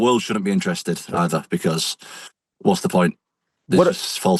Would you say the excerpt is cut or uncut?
uncut